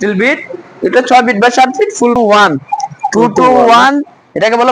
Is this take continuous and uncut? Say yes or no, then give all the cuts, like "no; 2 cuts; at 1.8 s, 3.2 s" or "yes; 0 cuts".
no; 1 cut; at 2.2 s